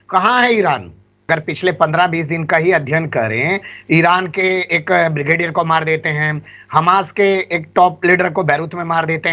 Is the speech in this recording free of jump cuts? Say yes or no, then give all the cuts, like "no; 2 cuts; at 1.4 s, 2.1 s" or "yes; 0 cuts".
no; 1 cut; at 1.2 s